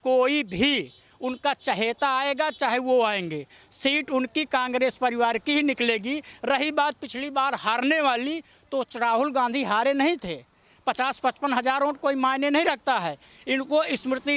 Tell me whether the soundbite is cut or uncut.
uncut